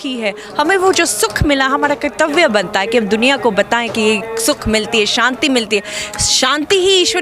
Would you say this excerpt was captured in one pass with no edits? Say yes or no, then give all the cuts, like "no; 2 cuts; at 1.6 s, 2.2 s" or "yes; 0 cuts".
yes; 0 cuts